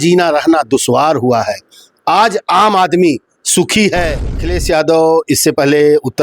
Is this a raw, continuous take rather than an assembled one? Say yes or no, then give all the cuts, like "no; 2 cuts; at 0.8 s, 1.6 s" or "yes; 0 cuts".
no; 1 cut; at 4.5 s